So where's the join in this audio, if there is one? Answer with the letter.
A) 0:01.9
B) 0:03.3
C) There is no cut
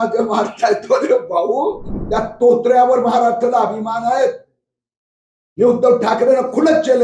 A